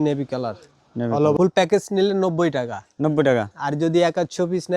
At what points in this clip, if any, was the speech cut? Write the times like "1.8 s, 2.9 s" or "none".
1.3 s